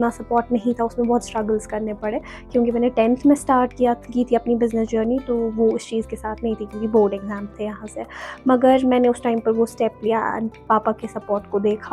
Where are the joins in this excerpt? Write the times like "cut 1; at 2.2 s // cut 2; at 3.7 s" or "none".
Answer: none